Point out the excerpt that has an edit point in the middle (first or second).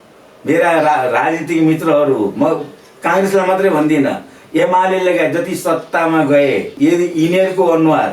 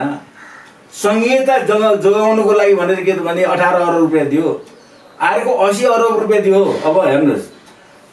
first